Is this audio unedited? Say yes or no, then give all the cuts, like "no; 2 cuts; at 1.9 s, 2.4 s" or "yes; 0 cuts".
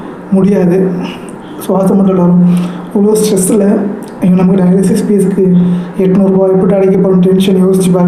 yes; 0 cuts